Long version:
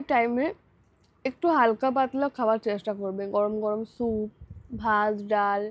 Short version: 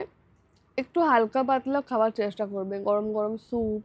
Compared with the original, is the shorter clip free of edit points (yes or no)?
yes